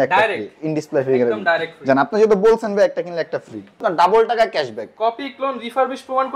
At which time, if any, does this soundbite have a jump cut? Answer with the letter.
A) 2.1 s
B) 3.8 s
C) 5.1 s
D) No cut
B